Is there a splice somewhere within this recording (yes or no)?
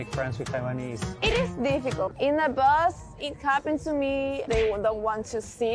yes